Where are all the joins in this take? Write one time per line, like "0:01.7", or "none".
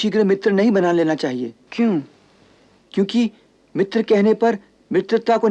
0:01.6